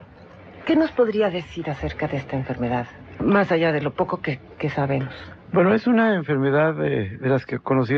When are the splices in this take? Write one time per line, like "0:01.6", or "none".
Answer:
0:03.0